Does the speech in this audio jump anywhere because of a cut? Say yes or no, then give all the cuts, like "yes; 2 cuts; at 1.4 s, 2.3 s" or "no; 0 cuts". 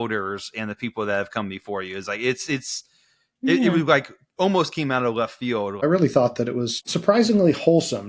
yes; 2 cuts; at 5.8 s, 6.9 s